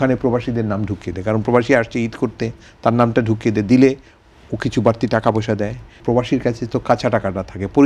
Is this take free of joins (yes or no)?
no